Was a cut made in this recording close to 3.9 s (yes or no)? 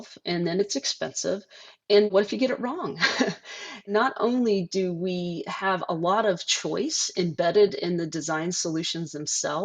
yes